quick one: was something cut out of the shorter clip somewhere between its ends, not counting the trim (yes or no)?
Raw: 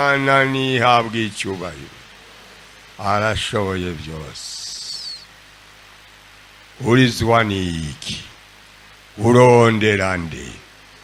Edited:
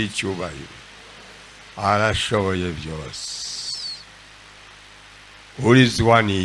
no